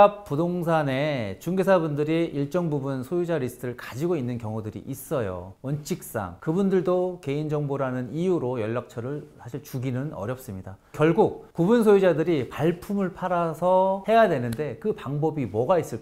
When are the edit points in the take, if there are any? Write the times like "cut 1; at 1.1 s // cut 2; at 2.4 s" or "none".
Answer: cut 1; at 5.5 s // cut 2; at 10.9 s